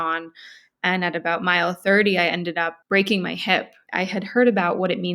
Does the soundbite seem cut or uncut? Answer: cut